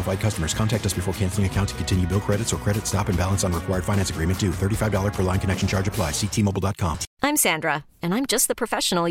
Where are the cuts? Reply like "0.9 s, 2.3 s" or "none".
7.1 s